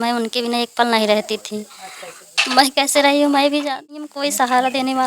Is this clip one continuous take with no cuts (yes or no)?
no